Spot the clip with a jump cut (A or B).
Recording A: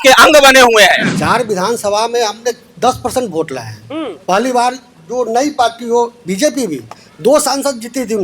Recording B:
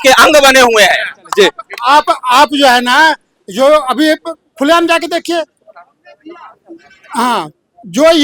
A